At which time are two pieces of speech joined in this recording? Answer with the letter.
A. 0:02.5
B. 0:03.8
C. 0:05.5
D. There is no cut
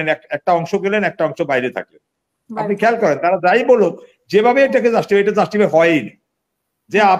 D